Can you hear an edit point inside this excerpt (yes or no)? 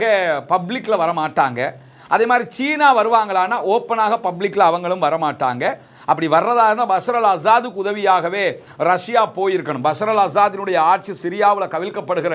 no